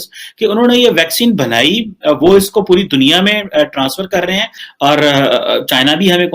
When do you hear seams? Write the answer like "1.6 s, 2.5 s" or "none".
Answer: 4.5 s